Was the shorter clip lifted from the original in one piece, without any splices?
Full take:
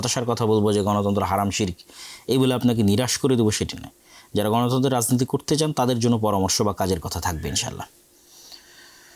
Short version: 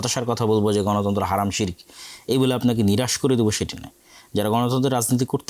yes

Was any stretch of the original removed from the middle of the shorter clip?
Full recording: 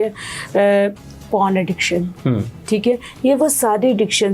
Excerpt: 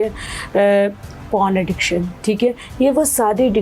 yes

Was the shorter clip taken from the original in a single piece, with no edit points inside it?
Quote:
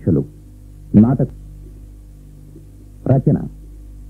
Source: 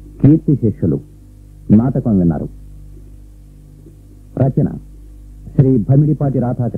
no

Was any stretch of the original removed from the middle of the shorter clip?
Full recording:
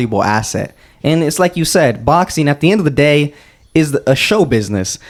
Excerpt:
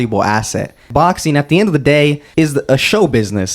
yes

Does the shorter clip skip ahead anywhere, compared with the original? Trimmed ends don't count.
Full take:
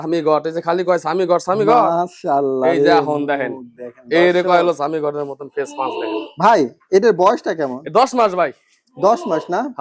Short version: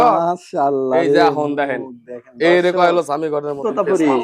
no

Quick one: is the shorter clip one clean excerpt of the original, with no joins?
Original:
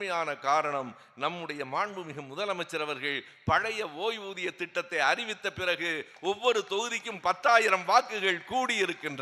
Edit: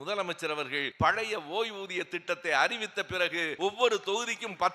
no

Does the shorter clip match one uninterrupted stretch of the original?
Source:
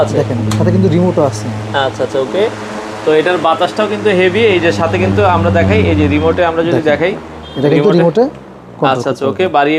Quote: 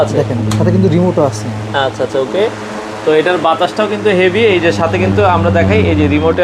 yes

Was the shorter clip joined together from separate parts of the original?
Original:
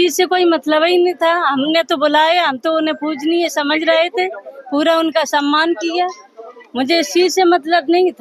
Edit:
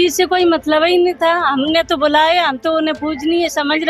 no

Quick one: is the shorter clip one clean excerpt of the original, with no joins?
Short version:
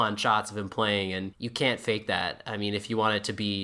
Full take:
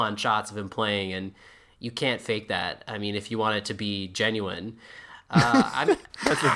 no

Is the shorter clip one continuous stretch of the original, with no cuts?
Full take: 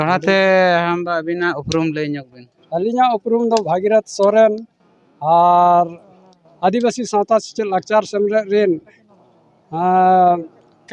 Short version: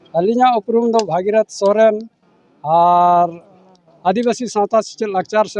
yes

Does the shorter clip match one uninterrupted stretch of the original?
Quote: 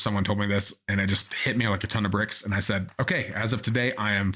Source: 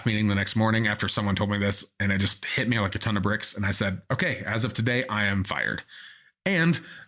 yes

